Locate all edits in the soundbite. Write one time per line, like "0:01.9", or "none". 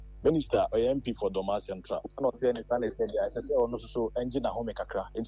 none